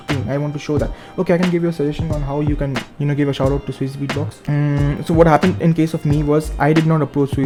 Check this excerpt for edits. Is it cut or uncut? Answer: uncut